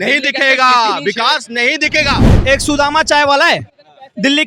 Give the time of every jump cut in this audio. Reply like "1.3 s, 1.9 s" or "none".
2.2 s